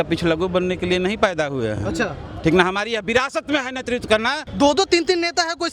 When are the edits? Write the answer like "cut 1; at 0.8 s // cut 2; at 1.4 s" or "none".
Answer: cut 1; at 4.4 s